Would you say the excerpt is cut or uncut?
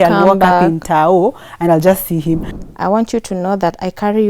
cut